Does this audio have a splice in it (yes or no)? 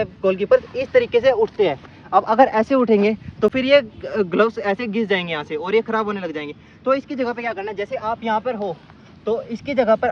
no